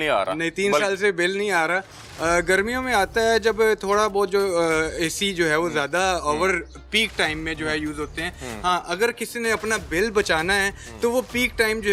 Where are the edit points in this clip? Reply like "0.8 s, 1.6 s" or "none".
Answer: none